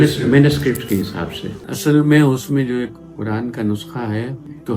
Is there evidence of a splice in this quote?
yes; 1 cut; at 1.5 s

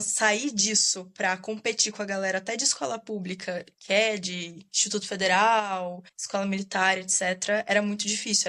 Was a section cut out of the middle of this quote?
no; 0 cuts

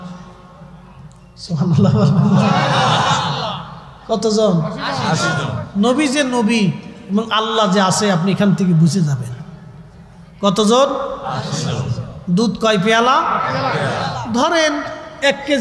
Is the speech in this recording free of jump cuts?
yes; 0 cuts

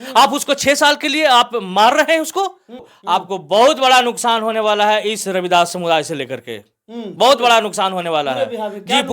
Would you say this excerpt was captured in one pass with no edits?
no; 1 cut; at 2.9 s

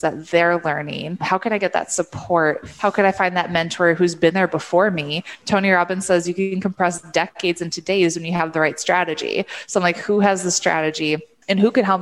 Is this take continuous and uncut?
yes; 0 cuts

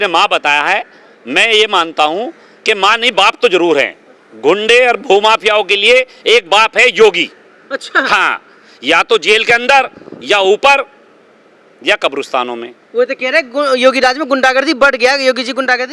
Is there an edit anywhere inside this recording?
no; 0 cuts

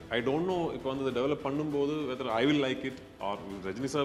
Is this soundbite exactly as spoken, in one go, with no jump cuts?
yes; 0 cuts

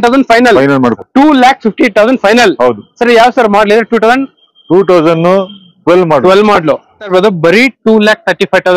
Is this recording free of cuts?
no; 2 cuts; at 1.0 s, 7.1 s

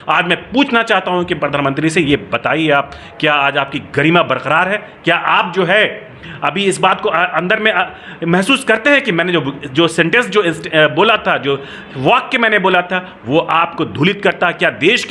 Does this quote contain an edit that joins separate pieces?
no; 0 cuts

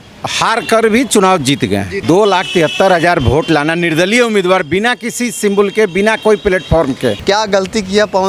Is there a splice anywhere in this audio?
yes; 2 cuts; at 2.0 s, 7.2 s

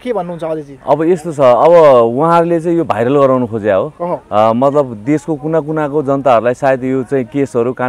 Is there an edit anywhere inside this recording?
no; 0 cuts

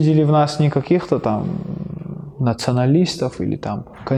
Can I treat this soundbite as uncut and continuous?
yes; 0 cuts

